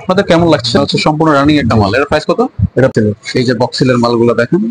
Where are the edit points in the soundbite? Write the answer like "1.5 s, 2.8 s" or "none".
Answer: 0.8 s, 2.9 s